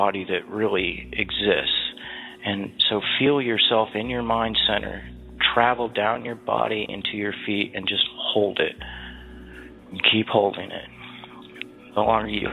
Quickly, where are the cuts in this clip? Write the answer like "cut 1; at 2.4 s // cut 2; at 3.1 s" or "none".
cut 1; at 10.1 s